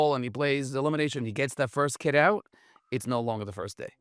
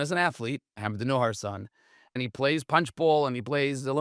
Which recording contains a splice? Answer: second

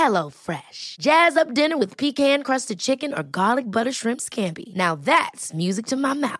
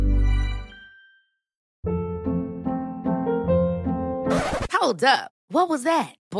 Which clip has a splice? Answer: second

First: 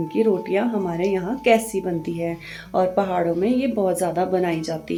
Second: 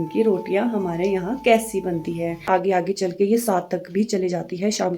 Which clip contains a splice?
second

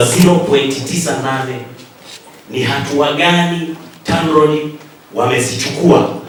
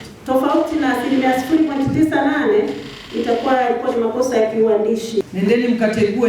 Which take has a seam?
second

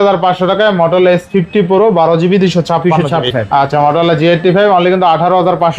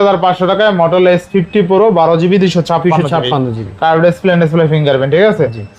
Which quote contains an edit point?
first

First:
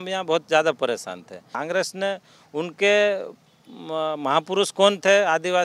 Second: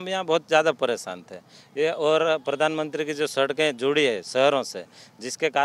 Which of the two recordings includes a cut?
first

